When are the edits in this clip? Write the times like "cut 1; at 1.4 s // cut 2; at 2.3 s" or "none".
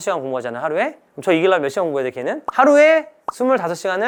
none